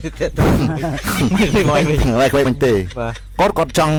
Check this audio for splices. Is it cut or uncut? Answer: uncut